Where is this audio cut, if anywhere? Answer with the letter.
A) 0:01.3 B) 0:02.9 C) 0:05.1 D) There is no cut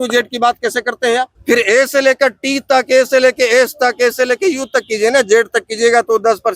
A